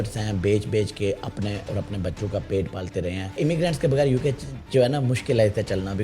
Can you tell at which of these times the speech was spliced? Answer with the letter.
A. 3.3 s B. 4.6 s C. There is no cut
A